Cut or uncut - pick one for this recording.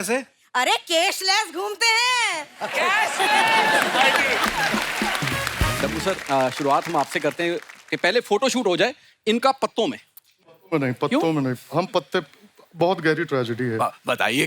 cut